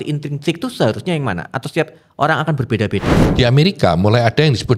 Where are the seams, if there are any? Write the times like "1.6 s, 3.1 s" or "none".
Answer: 3.2 s